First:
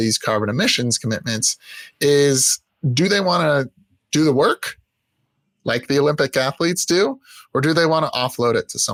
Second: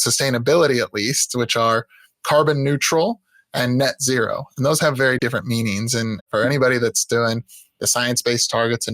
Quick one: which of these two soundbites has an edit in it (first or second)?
second